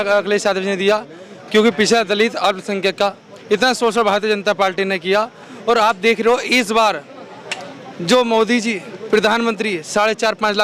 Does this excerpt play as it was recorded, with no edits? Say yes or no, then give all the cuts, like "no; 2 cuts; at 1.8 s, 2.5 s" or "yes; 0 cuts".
yes; 0 cuts